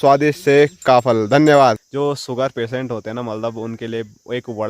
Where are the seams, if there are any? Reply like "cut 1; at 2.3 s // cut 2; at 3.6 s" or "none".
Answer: cut 1; at 1.9 s